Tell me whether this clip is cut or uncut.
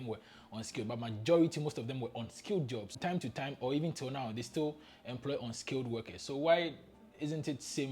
cut